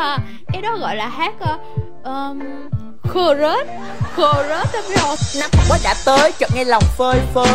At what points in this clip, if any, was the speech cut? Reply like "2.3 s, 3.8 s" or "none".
none